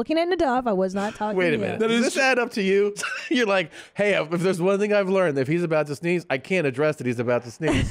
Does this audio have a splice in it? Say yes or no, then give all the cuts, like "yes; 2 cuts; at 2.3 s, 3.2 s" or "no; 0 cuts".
yes; 1 cut; at 3.0 s